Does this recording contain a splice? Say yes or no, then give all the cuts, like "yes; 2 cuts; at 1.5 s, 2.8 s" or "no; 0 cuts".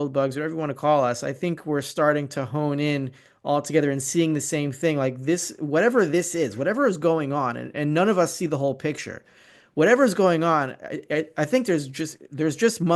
no; 0 cuts